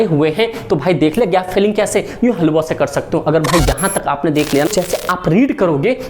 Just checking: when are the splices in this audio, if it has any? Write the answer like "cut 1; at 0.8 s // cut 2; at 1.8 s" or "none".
cut 1; at 4.7 s

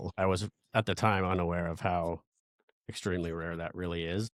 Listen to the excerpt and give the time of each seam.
none

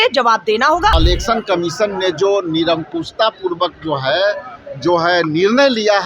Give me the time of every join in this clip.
cut 1; at 0.9 s

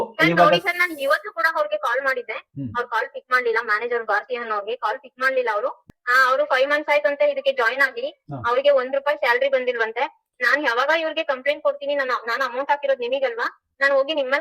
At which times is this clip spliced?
cut 1; at 5.9 s

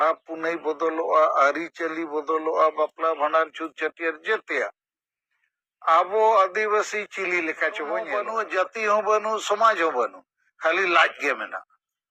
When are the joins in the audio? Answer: cut 1; at 8.2 s

